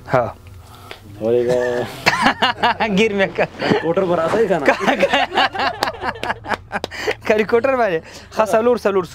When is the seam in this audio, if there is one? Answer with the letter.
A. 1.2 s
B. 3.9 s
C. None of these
C